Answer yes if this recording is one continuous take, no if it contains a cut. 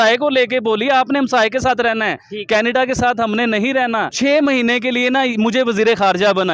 no